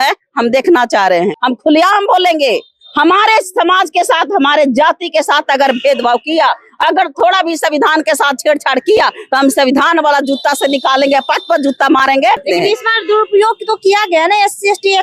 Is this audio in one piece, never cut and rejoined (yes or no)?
no